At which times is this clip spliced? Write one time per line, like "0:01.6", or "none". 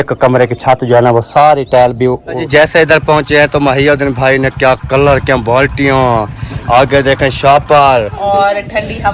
0:02.3
0:08.1